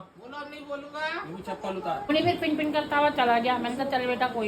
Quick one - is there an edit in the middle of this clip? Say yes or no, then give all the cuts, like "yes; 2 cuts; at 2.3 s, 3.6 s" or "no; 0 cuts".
yes; 1 cut; at 2.1 s